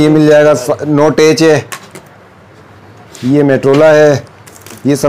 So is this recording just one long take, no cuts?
yes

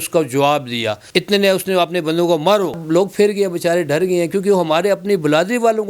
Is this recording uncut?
no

